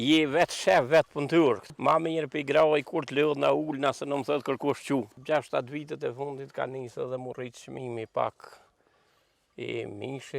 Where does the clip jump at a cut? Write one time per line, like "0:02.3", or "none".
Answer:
0:01.7
0:05.2